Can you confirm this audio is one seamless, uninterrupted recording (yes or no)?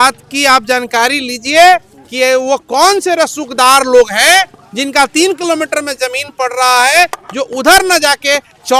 yes